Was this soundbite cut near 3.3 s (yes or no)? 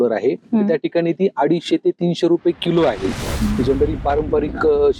yes